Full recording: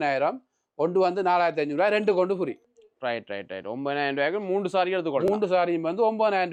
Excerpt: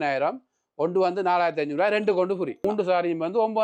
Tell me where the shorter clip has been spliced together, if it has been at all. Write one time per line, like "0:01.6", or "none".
0:02.6